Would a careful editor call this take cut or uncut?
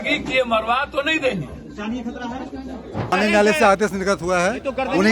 cut